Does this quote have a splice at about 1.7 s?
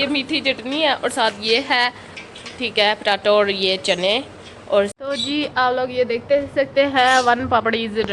no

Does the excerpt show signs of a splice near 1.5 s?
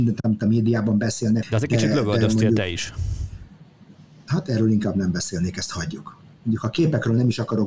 yes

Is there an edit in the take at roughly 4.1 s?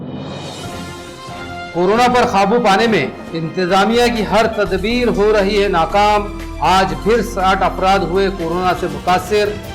no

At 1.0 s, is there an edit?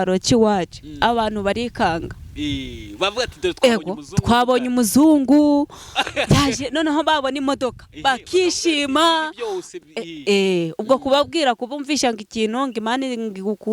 no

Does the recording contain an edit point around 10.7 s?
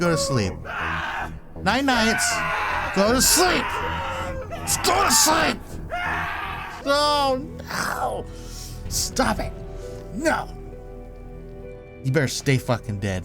no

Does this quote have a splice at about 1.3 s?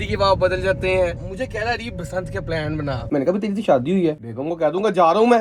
yes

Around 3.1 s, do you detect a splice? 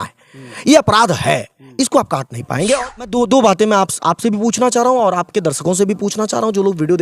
yes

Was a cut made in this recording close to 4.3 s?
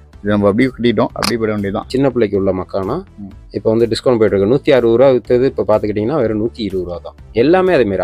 no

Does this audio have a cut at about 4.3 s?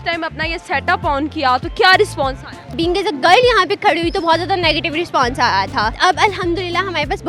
no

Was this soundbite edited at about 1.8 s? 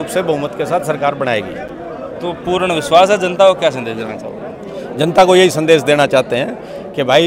no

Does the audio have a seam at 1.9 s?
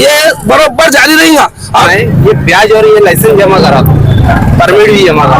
yes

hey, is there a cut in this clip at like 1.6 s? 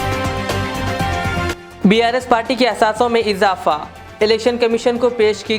yes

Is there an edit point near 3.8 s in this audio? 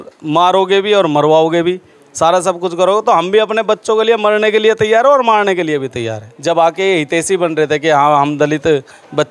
no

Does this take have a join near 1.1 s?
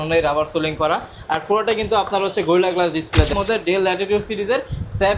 no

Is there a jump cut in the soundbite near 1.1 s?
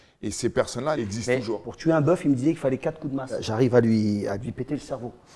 yes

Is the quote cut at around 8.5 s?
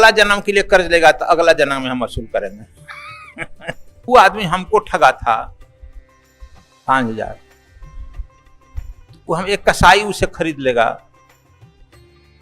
no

